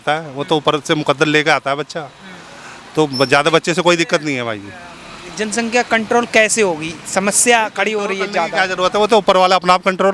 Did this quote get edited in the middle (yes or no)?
no